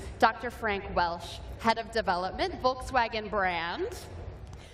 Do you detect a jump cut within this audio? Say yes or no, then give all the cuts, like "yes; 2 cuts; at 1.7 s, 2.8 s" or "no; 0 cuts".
no; 0 cuts